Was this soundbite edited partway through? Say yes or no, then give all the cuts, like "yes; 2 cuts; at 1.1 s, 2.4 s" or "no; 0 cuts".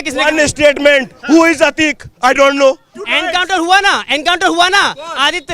yes; 1 cut; at 2.9 s